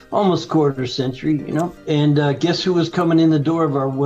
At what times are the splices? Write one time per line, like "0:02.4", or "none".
0:01.8